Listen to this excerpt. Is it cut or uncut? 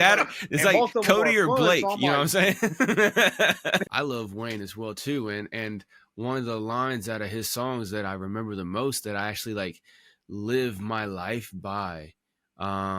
cut